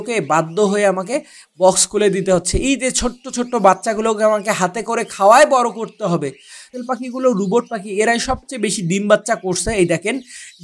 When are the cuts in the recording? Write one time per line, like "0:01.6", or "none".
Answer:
0:06.7